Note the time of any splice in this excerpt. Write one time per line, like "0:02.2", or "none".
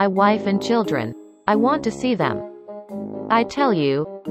none